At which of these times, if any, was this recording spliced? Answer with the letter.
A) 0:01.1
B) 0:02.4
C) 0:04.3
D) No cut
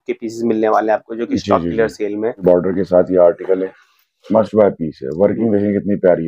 B